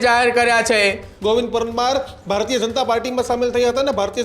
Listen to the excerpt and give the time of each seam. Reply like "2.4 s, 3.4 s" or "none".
1.1 s